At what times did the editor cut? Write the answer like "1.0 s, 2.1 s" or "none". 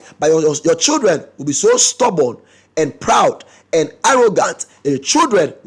none